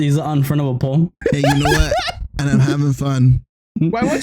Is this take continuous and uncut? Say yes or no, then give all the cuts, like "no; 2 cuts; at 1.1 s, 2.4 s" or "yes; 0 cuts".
no; 1 cut; at 1.2 s